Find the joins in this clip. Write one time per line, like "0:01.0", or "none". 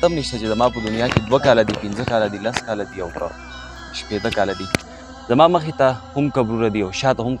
0:05.0